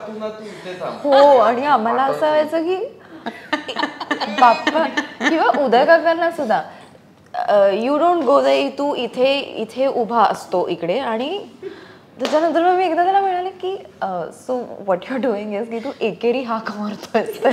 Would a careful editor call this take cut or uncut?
uncut